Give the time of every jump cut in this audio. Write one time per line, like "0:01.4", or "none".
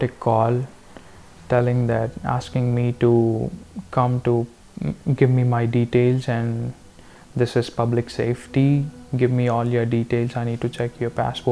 none